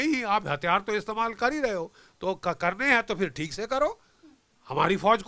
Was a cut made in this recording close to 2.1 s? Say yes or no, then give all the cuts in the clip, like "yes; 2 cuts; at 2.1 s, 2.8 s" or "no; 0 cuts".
no; 0 cuts